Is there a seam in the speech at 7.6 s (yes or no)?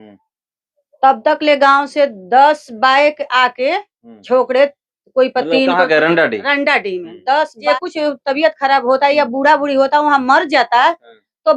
yes